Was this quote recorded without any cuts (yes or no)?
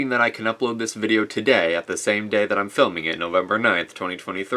yes